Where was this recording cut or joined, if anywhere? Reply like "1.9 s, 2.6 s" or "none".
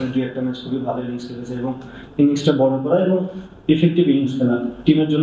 2.0 s